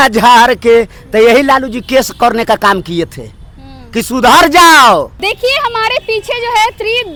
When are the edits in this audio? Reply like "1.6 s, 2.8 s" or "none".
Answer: none